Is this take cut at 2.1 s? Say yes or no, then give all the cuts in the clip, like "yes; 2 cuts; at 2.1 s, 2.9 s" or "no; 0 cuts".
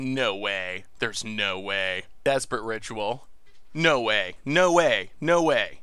yes; 1 cut; at 2.1 s